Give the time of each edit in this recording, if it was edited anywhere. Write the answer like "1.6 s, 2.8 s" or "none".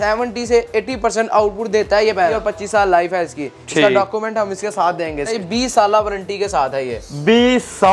2.4 s, 5.3 s